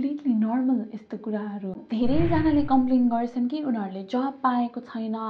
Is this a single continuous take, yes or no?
no